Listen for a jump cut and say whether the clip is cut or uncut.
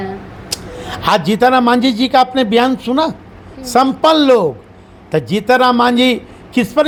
uncut